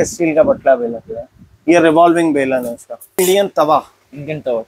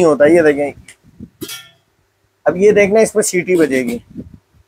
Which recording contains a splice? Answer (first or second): first